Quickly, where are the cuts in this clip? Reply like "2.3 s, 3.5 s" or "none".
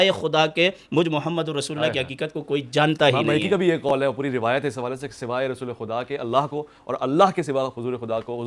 none